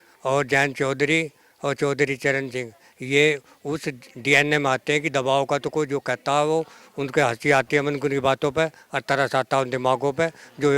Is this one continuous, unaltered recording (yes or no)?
yes